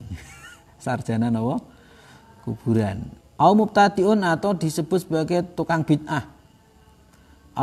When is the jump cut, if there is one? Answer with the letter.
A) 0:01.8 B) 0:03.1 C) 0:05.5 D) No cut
B